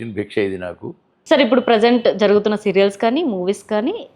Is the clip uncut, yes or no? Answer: no